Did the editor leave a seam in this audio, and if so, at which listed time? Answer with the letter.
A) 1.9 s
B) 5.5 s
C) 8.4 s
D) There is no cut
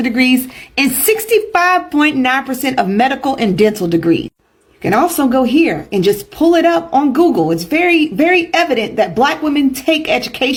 D